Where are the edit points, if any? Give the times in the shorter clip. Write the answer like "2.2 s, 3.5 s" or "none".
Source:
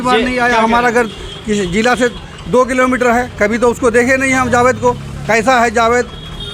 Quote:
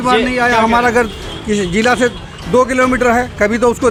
none